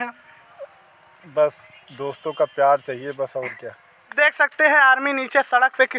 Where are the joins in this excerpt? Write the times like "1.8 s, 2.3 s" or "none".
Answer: 4.1 s